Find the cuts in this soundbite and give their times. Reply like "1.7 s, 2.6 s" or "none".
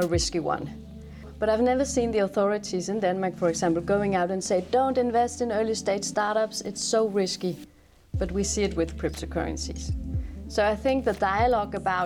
1.3 s